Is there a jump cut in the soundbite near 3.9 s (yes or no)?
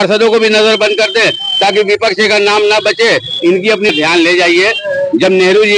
yes